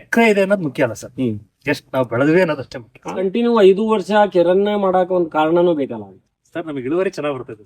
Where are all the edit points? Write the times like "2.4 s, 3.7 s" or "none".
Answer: 3.2 s